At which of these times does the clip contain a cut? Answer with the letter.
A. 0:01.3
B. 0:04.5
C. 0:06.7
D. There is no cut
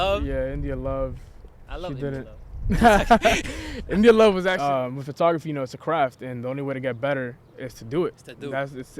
B